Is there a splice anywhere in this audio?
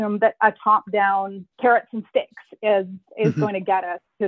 yes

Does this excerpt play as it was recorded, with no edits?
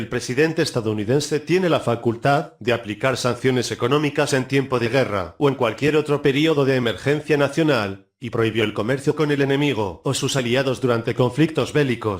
no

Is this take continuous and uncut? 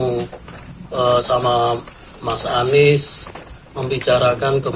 yes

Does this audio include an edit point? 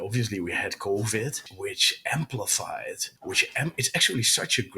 yes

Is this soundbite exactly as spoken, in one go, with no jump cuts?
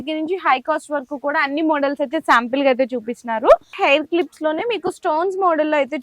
no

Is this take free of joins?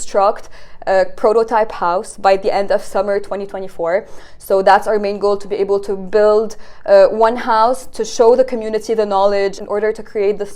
no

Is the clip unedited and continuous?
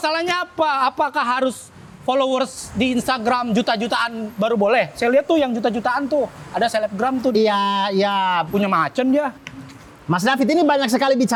yes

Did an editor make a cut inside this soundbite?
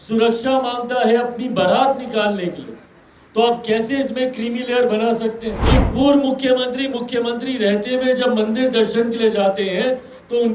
yes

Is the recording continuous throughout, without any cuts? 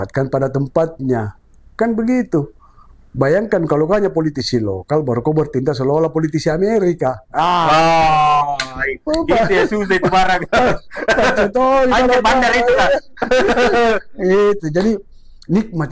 yes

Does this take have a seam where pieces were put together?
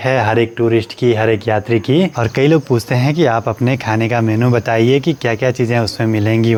no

